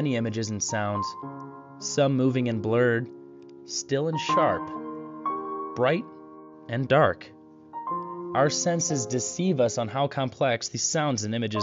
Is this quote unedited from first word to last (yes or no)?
no